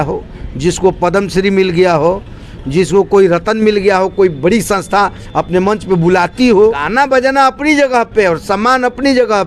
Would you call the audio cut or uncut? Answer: cut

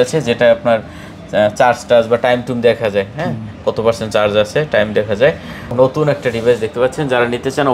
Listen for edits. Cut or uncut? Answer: cut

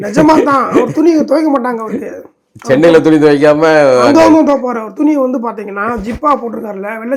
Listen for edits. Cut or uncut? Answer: uncut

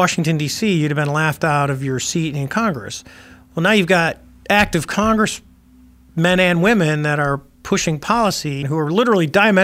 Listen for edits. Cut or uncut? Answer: cut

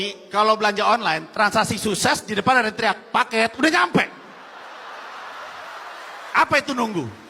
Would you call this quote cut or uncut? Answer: uncut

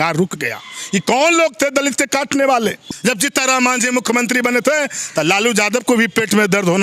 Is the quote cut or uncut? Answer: cut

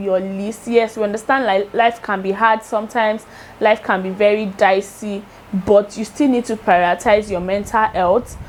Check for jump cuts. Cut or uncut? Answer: uncut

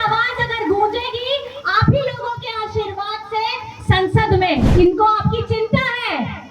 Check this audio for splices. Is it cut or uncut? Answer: cut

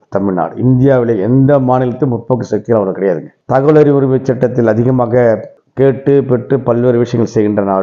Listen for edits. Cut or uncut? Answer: uncut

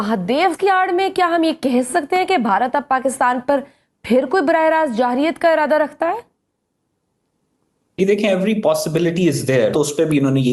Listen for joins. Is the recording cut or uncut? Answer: uncut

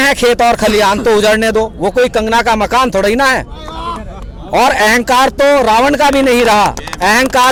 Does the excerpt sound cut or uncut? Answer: uncut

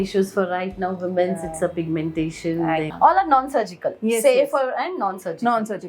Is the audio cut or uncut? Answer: cut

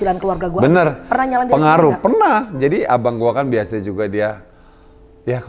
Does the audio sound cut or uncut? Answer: uncut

